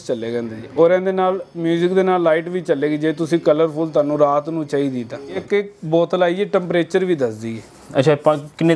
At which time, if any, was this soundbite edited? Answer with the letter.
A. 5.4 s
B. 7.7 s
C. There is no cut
A